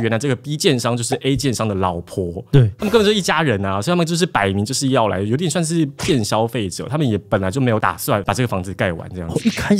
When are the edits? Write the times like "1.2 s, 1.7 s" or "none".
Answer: 8.2 s